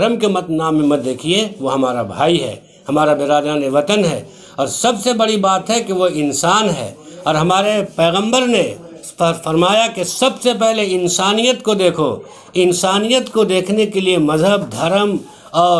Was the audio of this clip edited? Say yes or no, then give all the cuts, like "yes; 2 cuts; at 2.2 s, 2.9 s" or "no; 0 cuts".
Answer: no; 0 cuts